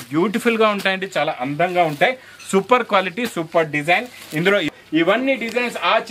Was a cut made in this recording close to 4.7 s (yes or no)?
yes